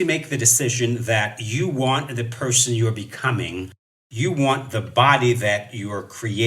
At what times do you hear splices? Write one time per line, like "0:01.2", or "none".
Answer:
0:03.9